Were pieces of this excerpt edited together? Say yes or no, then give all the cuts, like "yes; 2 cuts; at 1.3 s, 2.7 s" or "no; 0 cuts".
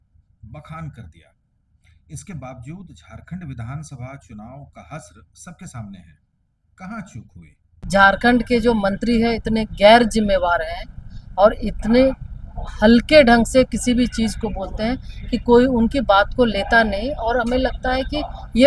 yes; 1 cut; at 7.7 s